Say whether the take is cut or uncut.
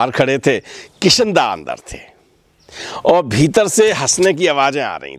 uncut